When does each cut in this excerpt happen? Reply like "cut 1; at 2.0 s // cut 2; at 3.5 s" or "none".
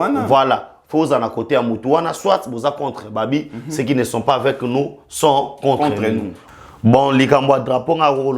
cut 1; at 6.4 s